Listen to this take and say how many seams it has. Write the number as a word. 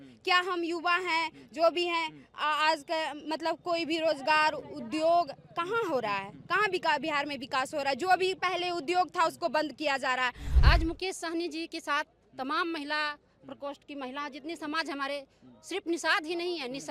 one